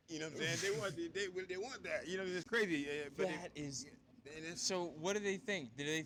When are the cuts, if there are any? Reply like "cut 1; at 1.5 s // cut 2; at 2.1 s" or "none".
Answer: none